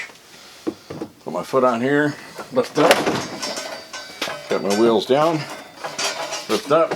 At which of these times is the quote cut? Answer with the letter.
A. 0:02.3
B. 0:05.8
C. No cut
B